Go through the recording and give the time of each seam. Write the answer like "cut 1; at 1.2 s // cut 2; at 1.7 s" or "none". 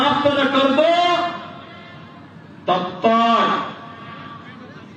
none

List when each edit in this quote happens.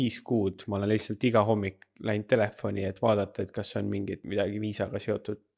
cut 1; at 4.2 s

